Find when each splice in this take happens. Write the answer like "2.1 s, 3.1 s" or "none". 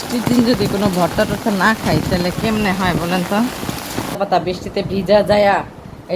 4.2 s